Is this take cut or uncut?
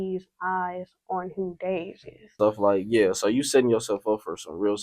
cut